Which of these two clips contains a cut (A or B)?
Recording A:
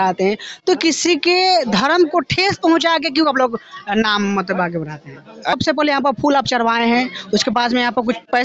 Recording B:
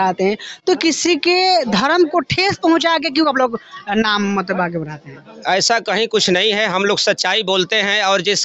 A